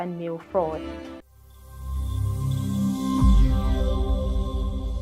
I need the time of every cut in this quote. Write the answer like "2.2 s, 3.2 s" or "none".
1.1 s

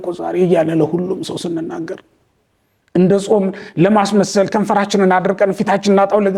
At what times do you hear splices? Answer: none

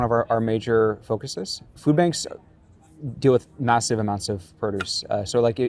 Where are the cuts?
1.7 s

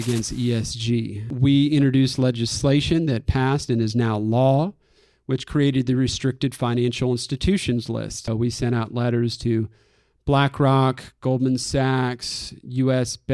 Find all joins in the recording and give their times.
1.3 s, 8.3 s

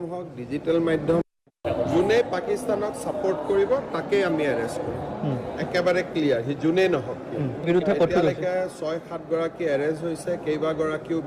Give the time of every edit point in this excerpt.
1.2 s

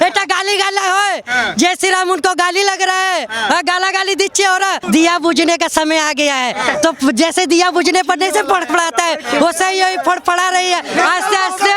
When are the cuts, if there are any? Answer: 4.8 s

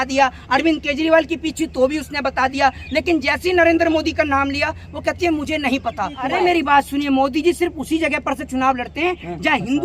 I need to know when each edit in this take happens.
6.2 s

